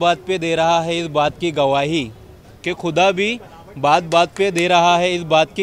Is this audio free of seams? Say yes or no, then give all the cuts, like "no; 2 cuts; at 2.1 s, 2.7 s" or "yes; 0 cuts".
yes; 0 cuts